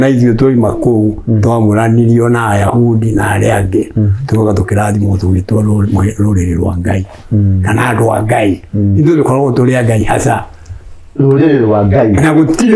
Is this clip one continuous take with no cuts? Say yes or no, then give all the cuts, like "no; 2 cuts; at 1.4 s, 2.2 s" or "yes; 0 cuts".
yes; 0 cuts